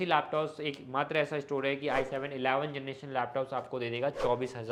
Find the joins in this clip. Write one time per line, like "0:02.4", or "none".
none